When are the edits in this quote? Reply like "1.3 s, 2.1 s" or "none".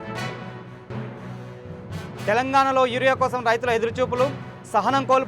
0.9 s